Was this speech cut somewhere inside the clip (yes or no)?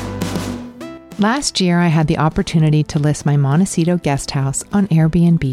yes